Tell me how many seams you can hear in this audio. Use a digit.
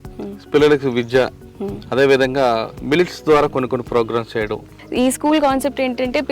1